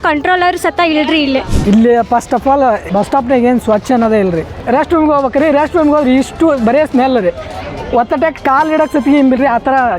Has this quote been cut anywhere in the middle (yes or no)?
yes